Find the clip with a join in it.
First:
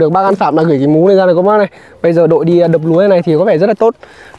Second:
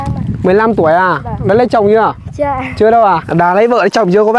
second; 1 cut; at 3.2 s

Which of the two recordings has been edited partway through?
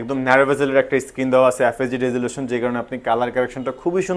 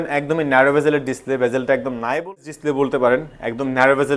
second; 1 cut; at 2.4 s

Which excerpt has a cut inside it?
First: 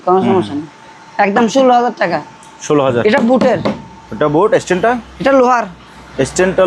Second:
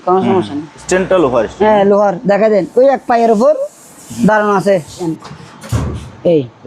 second; 2 cuts; at 0.8 s, 5.2 s

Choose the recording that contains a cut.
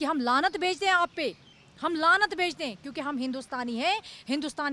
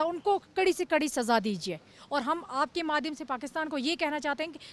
second; 1 cut; at 1.9 s

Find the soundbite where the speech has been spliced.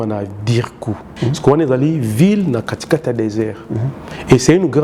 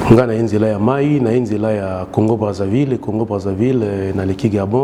first; 1 cut; at 1.1 s

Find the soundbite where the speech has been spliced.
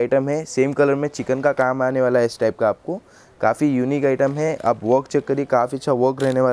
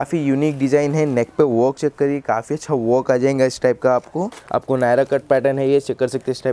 second; 1 cut; at 4.4 s

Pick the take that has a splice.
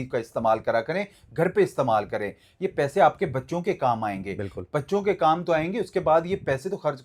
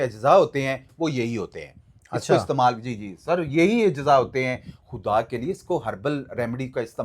second; 1 cut; at 4.7 s

